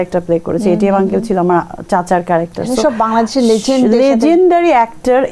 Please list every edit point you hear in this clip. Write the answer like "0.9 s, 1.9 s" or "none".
none